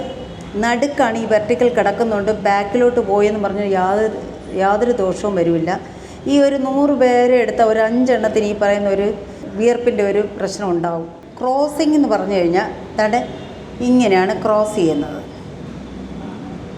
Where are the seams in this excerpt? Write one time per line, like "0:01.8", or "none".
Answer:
0:09.5
0:11.3